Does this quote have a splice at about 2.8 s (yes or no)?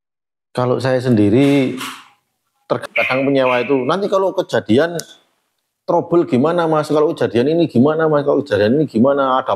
yes